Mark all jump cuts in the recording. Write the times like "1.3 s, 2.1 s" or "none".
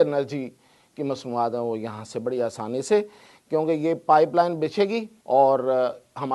5.1 s